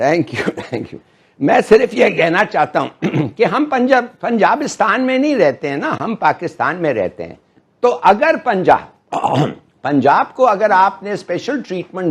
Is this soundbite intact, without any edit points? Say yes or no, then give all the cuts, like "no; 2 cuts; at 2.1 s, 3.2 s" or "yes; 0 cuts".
no; 1 cut; at 5.9 s